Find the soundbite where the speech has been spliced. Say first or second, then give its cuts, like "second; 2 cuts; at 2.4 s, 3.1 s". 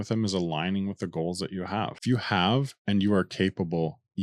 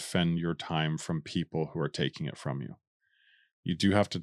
first; 1 cut; at 2.0 s